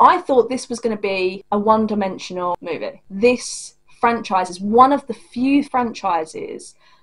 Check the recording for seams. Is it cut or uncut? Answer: cut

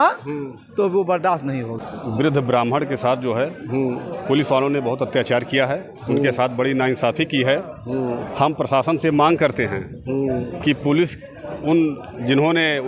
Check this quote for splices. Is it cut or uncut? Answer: cut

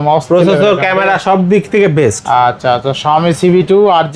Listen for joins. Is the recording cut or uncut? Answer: uncut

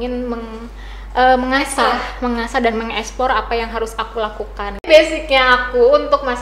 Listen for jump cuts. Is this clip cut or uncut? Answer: cut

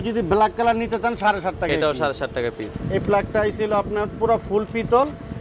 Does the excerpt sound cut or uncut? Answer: cut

